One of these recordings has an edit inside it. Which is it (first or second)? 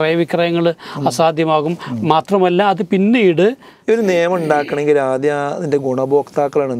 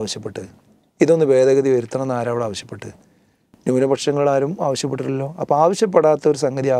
first